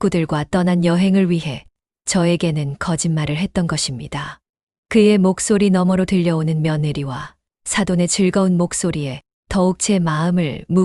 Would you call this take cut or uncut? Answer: uncut